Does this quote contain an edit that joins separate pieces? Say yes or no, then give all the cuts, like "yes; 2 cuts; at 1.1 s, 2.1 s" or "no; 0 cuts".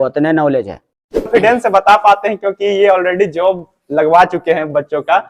yes; 1 cut; at 1.3 s